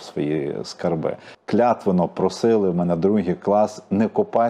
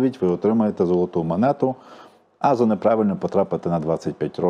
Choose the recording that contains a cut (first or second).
first